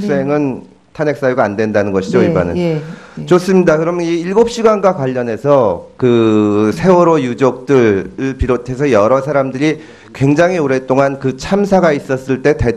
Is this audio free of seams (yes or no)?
no